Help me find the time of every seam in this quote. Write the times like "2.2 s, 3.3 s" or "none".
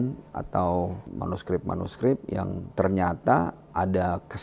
1.1 s